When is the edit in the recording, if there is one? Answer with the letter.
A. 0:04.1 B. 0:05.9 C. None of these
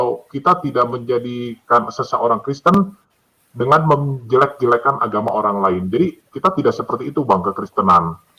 C